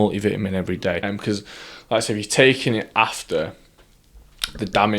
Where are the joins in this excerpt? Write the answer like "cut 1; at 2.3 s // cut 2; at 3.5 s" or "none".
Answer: cut 1; at 1.0 s